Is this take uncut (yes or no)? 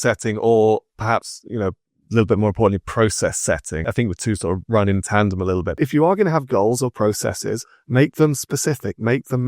no